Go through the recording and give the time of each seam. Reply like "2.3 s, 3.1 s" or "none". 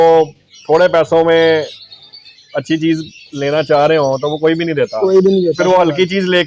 none

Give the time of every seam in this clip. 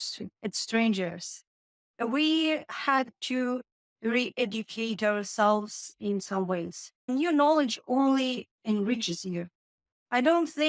7.0 s

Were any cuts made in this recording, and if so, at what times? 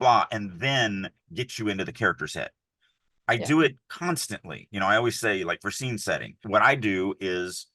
6.4 s

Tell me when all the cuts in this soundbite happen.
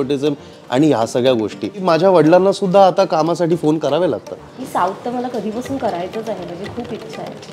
1.8 s, 4.6 s

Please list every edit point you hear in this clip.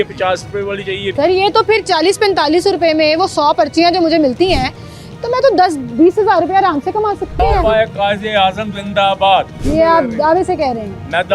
1.1 s, 7.4 s, 9.6 s

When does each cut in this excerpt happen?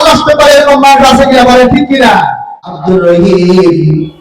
2.7 s

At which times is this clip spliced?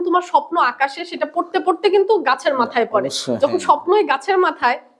none

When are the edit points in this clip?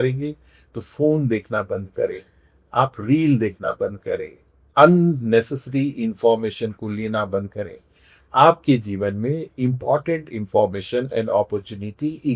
none

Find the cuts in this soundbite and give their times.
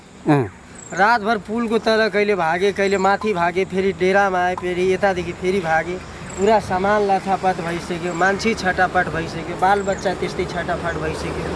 none

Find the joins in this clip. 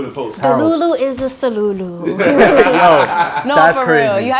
none

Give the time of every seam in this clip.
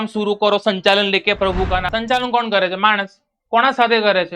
1.9 s

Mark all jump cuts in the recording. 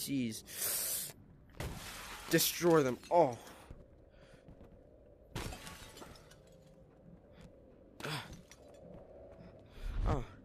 none

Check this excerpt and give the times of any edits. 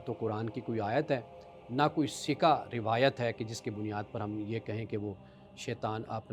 none

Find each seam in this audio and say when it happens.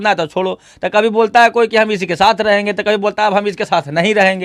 none

